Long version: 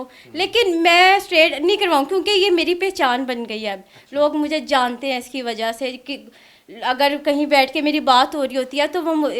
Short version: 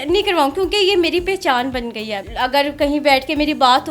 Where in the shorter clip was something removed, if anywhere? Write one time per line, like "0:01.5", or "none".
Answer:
0:02.2

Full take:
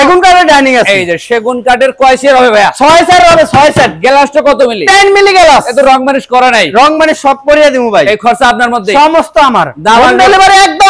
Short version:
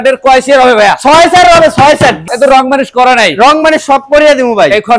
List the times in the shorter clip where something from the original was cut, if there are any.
0:02.3

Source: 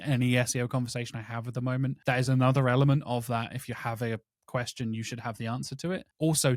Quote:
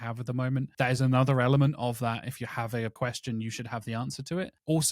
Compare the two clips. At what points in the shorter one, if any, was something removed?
0:02.9

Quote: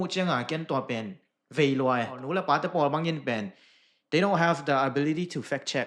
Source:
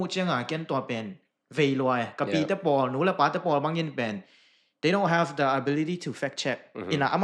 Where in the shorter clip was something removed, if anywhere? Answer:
0:02.2

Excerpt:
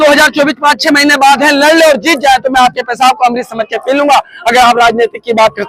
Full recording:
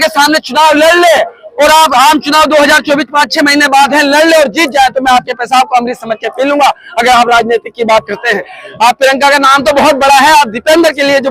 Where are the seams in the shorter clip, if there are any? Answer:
none

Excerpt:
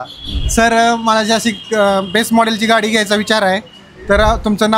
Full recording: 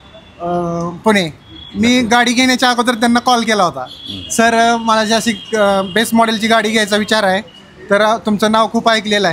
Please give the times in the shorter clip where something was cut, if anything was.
none

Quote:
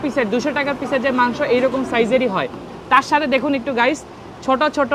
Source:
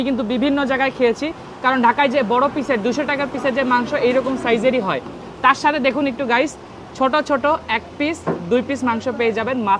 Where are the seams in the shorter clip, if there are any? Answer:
none

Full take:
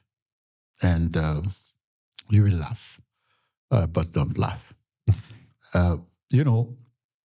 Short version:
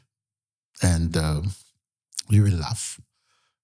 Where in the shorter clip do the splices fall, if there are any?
none

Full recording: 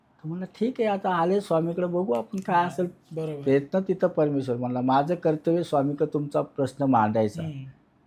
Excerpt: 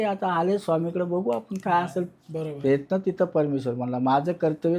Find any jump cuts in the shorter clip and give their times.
none

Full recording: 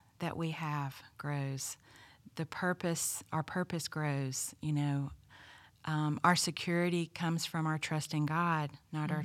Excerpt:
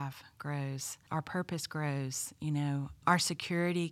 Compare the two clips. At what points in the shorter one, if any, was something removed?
0:00.9
0:03.0

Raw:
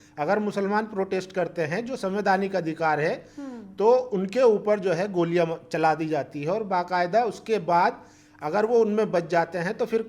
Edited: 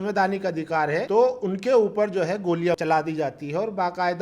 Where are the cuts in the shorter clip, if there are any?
0:01.1
0:02.8

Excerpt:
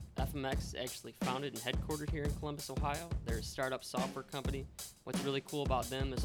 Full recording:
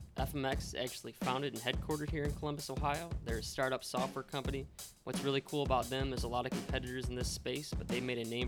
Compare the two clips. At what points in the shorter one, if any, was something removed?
none

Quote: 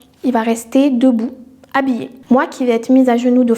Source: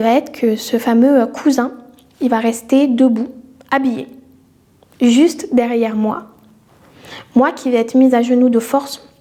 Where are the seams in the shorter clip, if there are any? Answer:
0:02.1

